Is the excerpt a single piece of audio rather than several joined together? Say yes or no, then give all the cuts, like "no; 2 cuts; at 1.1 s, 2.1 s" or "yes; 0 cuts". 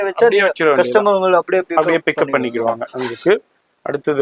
yes; 0 cuts